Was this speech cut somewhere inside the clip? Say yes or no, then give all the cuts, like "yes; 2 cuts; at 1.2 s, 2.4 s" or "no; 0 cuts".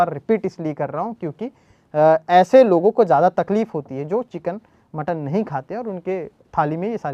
no; 0 cuts